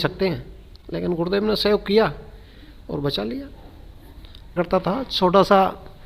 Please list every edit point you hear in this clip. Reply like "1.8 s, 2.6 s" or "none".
4.6 s